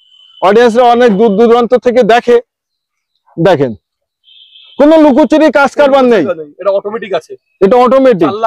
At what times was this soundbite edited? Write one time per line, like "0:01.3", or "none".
none